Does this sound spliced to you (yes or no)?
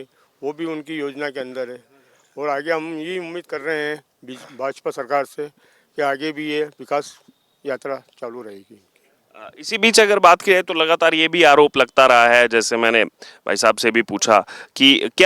no